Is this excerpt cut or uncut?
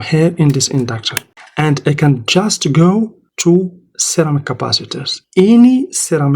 cut